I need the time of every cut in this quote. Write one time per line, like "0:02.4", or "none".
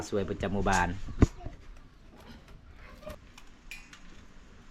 0:03.1